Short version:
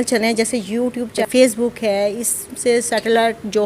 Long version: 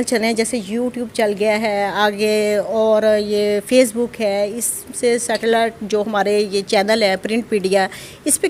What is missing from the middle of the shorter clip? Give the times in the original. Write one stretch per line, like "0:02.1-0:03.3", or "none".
0:01.2-0:03.6

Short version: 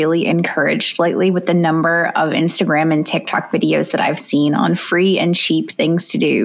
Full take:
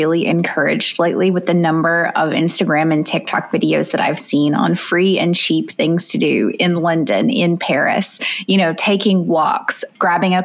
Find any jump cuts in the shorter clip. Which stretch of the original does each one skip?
none

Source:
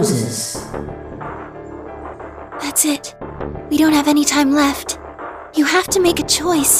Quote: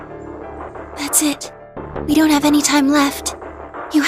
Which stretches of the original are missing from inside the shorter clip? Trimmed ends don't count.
0:02.4-0:02.6

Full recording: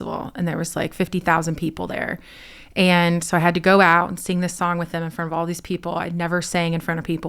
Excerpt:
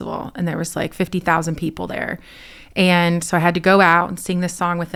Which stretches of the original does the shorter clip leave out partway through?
none

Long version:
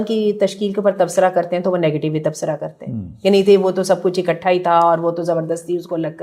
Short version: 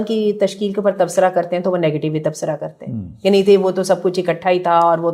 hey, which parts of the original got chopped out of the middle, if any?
none

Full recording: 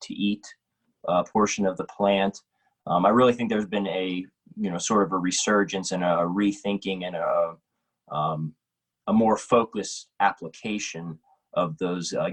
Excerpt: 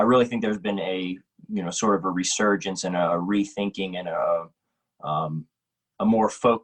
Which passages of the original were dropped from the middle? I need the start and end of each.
none

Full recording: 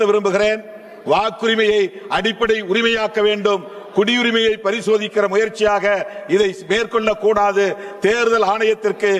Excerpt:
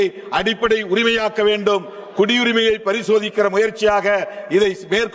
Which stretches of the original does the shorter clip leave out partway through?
none

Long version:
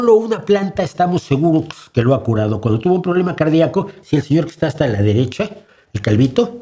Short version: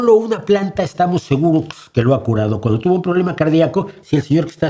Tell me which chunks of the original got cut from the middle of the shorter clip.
none

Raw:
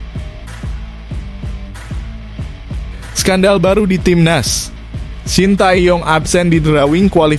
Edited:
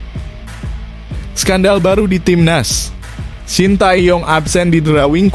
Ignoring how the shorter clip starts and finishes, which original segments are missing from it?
0:01.4-0:03.2

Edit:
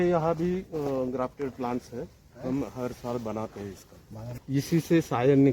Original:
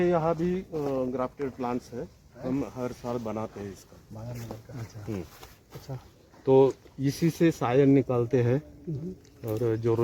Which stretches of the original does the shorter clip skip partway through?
0:04.4-0:06.9

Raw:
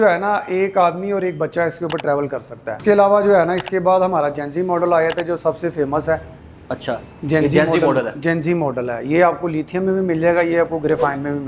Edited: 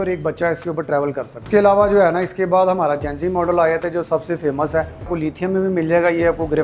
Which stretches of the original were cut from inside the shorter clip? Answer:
0:02.5-0:02.7
0:06.4-0:09.4

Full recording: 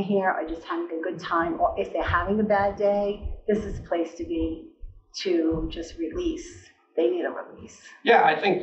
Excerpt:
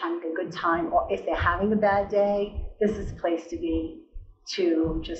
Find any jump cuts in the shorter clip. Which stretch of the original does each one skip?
none

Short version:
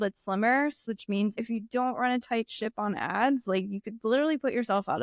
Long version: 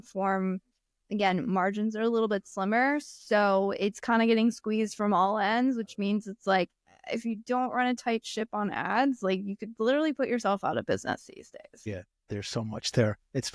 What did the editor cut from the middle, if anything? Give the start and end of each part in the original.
0:03.2-0:06.7

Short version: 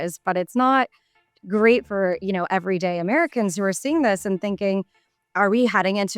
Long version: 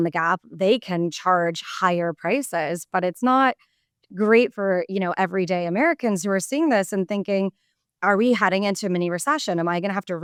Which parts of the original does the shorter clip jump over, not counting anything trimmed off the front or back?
none

